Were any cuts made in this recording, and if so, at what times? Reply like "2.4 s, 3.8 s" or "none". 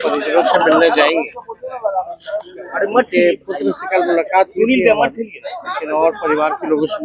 none